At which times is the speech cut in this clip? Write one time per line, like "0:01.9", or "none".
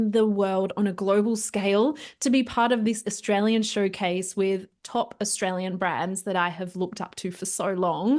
none